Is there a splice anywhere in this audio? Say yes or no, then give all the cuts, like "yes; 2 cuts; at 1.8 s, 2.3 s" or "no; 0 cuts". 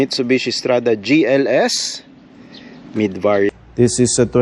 yes; 1 cut; at 3.5 s